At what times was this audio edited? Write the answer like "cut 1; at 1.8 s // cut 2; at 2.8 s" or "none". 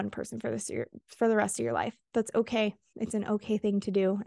cut 1; at 2.9 s